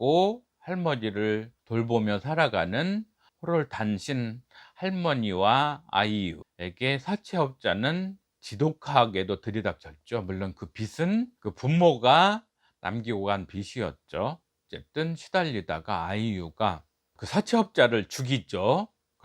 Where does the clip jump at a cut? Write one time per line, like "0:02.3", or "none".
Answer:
0:14.7